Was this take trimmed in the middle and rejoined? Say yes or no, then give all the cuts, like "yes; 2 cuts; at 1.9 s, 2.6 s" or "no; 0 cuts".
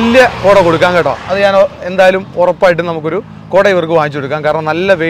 no; 0 cuts